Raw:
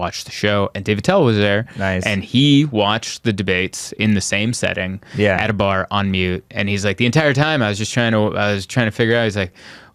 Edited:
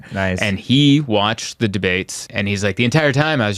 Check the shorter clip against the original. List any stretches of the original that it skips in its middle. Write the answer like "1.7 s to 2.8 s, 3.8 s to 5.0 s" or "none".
3.9 s to 6.4 s